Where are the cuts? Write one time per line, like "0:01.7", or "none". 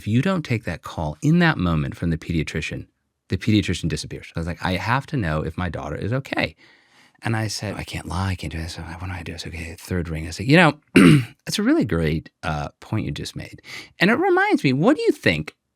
0:04.3
0:07.8